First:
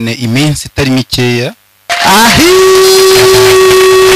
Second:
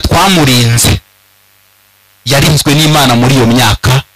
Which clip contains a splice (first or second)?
first